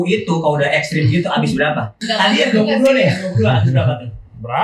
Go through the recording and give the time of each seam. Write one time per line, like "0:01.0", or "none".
0:02.0